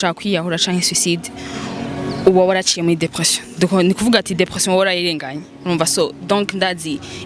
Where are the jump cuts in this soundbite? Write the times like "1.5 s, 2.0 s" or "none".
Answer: none